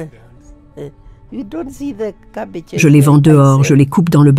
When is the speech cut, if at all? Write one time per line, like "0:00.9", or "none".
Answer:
0:02.8